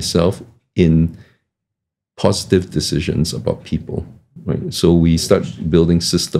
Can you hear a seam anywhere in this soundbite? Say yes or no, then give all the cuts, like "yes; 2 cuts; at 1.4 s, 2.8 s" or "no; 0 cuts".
no; 0 cuts